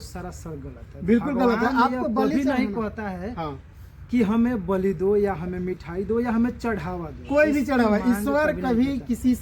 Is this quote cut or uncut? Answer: uncut